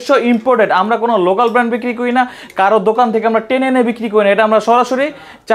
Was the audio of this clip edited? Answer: no; 0 cuts

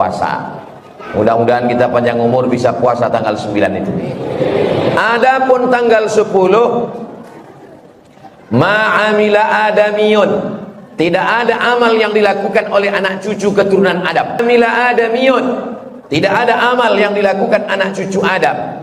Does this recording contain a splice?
yes; 1 cut; at 14.4 s

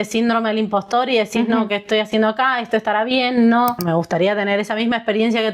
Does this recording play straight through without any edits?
no; 1 cut; at 3.8 s

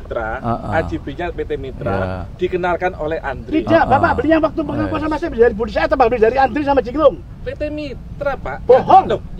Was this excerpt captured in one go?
yes; 0 cuts

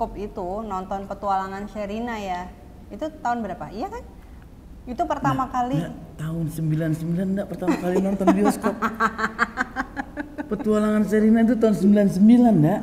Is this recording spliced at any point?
no; 0 cuts

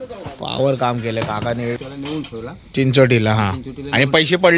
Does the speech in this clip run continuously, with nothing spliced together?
no; 1 cut; at 1.8 s

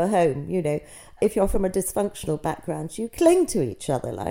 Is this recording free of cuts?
no; 1 cut; at 1.1 s

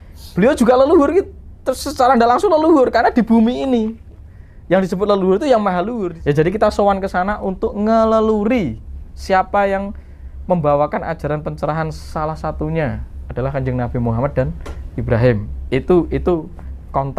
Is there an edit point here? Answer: yes; 1 cut; at 6.0 s

